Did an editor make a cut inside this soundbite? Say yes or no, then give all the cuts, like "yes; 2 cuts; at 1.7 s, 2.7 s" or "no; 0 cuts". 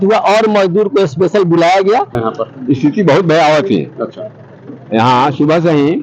yes; 1 cut; at 2.2 s